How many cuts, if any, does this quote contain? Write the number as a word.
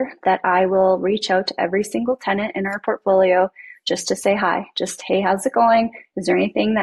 zero